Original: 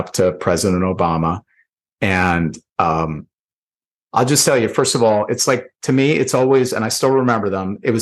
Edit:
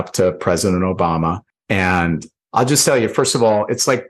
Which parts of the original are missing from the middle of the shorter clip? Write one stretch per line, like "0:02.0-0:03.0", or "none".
0:01.5-0:01.8
0:02.6-0:03.9